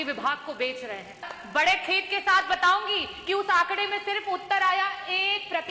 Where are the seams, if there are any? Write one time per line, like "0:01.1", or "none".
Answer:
0:01.3